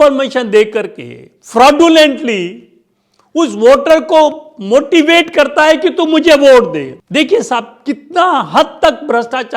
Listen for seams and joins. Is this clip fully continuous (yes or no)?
no